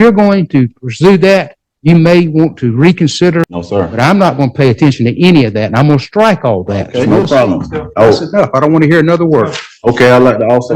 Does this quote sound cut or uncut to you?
cut